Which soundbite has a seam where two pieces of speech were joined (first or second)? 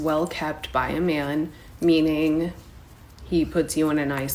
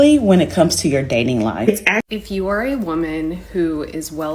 second